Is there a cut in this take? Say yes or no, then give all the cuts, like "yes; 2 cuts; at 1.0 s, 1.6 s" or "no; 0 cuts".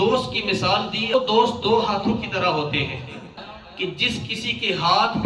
yes; 2 cuts; at 1.1 s, 3.4 s